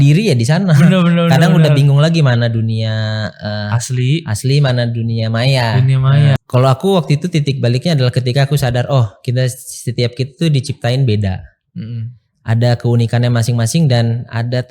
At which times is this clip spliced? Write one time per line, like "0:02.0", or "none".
0:06.4